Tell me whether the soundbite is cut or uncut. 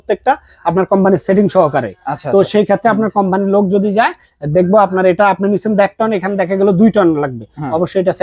uncut